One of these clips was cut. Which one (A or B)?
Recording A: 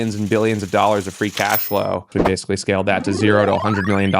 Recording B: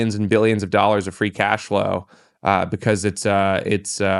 A